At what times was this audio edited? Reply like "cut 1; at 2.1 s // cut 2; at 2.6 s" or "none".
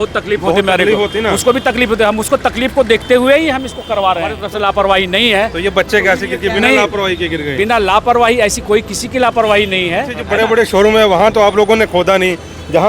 cut 1; at 4.4 s // cut 2; at 10.2 s